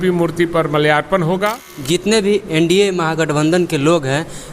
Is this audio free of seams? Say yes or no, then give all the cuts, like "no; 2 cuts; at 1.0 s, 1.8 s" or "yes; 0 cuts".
no; 1 cut; at 2.0 s